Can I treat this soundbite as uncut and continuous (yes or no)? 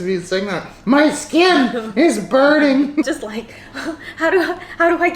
no